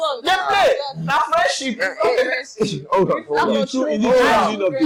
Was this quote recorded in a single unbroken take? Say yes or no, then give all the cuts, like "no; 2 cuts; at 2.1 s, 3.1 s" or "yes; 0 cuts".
yes; 0 cuts